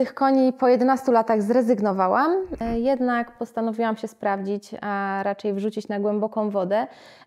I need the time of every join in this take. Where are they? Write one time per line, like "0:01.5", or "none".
0:02.6